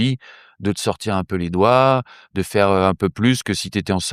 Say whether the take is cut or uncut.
uncut